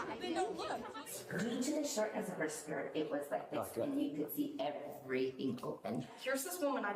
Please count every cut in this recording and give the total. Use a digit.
2